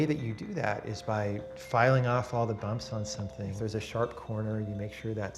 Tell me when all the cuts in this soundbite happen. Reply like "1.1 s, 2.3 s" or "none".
3.5 s